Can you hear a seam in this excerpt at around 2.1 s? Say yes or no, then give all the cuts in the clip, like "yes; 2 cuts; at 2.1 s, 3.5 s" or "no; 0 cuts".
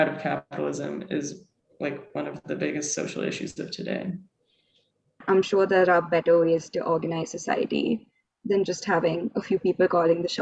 no; 1 cut; at 5.2 s